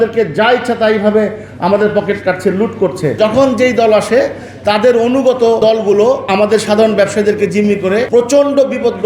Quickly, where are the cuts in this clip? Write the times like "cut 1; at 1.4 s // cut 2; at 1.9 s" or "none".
cut 1; at 3.2 s // cut 2; at 6.1 s // cut 3; at 8.1 s